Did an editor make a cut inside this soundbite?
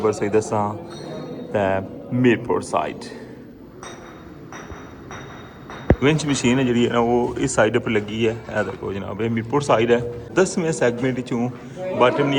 yes; 2 cuts; at 6.0 s, 10.3 s

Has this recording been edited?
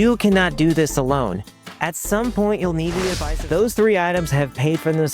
yes; 1 cut; at 3.3 s

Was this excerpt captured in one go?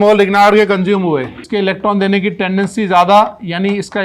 no; 1 cut; at 1.4 s

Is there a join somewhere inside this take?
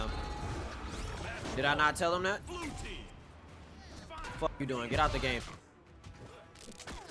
yes; 1 cut; at 5.4 s

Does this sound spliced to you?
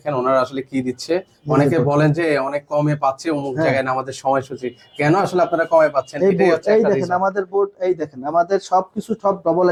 no; 0 cuts

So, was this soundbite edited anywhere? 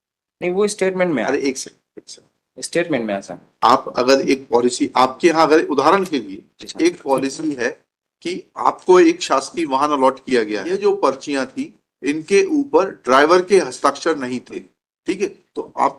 yes; 1 cut; at 10.6 s

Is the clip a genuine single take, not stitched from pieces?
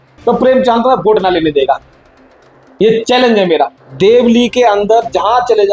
no; 1 cut; at 3.8 s

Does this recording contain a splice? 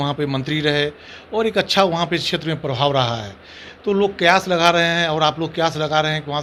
no; 0 cuts

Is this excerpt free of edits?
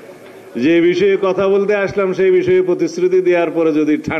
yes; 0 cuts

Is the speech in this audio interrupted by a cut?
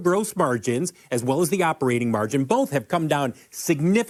no; 0 cuts

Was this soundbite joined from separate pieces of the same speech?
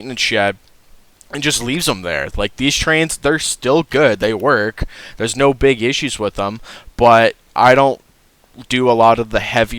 no; 0 cuts

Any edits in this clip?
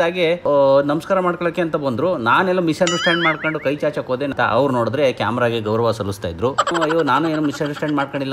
no; 0 cuts

